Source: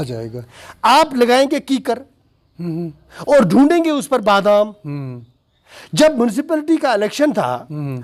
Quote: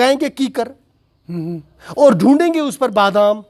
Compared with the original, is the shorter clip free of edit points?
yes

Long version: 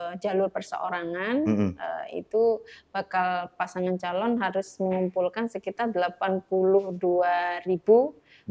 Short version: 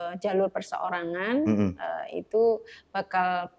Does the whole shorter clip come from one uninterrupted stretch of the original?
yes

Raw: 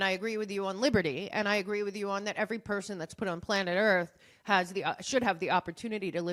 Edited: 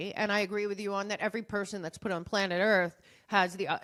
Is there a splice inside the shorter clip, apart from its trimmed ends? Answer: no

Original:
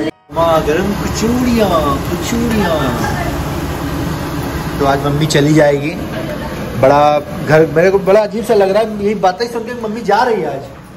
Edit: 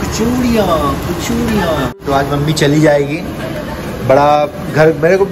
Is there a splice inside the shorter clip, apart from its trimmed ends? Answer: yes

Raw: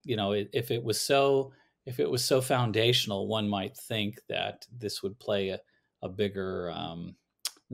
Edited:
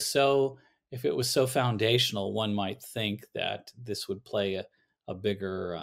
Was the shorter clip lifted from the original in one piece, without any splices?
yes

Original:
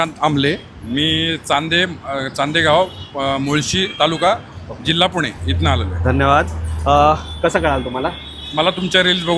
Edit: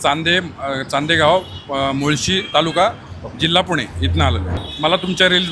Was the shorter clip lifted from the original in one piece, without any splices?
no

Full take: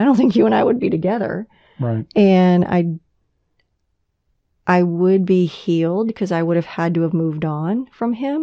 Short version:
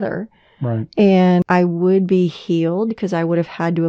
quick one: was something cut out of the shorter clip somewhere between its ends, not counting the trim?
yes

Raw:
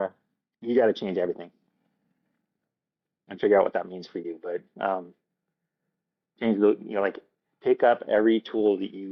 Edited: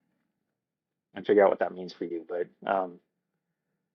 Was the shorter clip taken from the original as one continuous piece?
yes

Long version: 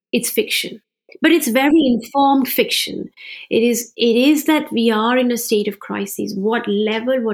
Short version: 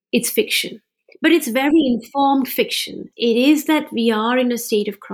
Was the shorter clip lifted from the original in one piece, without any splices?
no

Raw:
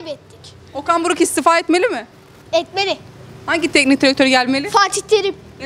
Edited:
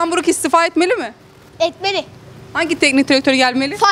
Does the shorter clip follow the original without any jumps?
yes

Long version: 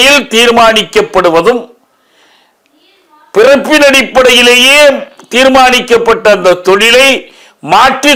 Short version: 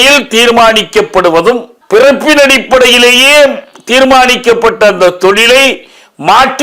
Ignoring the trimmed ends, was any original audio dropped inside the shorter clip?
yes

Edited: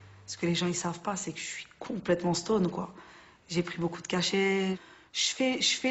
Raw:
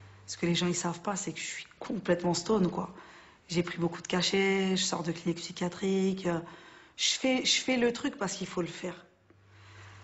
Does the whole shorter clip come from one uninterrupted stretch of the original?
no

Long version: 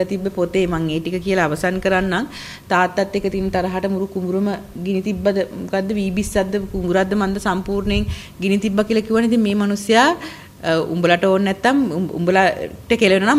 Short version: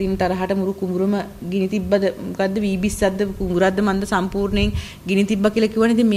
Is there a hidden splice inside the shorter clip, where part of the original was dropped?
no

